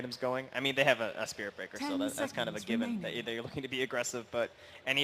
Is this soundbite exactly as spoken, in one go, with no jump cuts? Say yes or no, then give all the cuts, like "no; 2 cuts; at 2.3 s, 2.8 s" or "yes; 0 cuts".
no; 1 cut; at 3.4 s